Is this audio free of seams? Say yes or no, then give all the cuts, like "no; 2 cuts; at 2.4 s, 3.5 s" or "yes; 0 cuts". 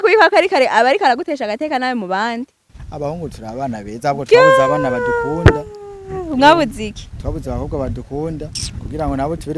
no; 1 cut; at 2.8 s